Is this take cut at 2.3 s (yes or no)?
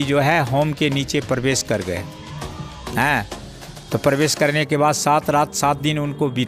no